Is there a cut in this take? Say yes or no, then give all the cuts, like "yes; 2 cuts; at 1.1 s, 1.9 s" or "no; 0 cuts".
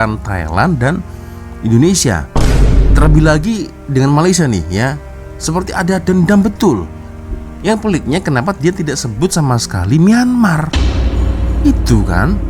no; 0 cuts